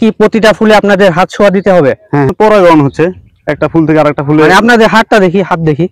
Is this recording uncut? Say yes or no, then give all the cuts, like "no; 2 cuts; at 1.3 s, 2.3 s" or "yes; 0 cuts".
no; 1 cut; at 2.3 s